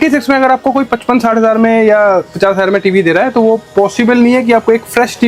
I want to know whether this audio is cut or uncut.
uncut